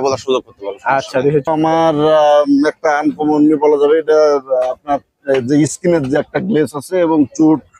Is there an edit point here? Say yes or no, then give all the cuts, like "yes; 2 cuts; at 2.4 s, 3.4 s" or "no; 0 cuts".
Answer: yes; 1 cut; at 1.5 s